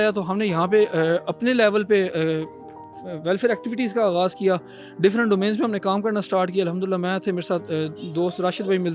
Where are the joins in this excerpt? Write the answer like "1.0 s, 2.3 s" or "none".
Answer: none